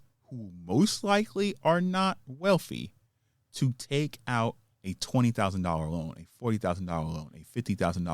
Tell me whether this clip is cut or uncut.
cut